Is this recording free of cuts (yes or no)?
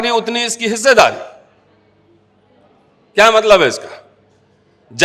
yes